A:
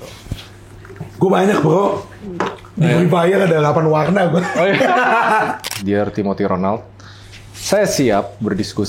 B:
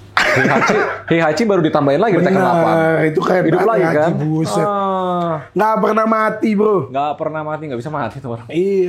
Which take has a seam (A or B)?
A